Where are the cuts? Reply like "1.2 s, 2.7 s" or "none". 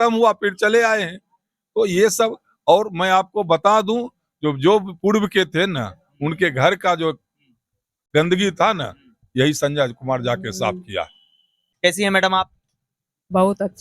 11.6 s